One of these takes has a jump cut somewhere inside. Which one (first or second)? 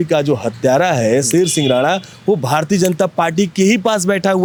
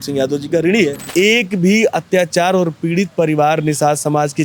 second